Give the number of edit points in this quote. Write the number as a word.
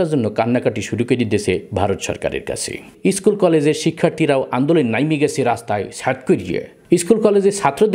two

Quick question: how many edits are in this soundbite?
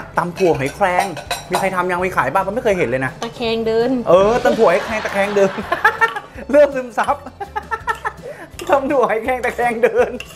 zero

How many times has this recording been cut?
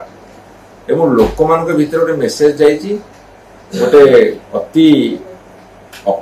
zero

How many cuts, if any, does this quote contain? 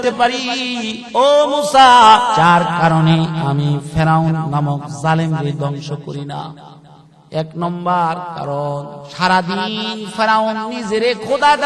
two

